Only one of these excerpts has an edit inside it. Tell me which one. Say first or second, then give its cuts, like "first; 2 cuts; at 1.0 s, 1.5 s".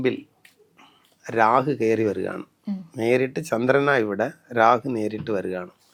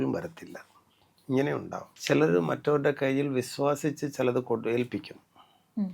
second; 1 cut; at 1.8 s